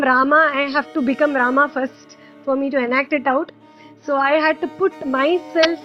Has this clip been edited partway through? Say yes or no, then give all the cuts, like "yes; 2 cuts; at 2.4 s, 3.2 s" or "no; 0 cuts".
no; 0 cuts